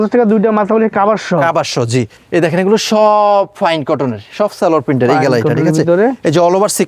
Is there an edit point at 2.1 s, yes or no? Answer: yes